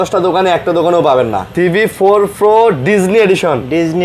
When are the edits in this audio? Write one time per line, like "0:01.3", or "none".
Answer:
0:01.4